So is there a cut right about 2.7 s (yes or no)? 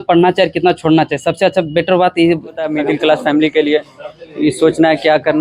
yes